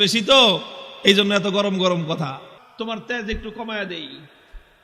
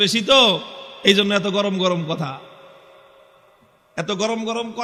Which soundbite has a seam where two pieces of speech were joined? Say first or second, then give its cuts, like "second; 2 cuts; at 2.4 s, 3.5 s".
first; 1 cut; at 2.6 s